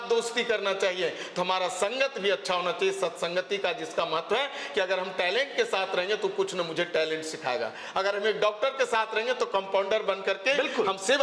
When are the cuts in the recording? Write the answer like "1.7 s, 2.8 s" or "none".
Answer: none